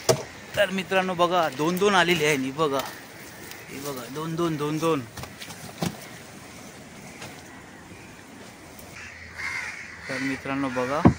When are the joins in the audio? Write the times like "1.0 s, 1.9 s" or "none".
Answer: 9.0 s